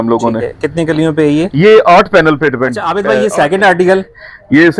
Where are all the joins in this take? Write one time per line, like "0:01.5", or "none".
0:03.0